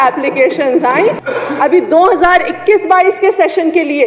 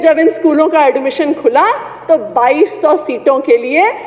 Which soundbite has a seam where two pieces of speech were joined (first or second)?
first